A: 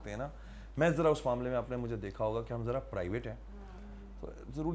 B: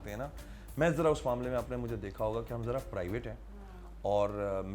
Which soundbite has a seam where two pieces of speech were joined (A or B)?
A